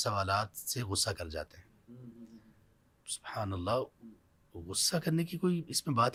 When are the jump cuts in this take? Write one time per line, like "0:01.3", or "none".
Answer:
none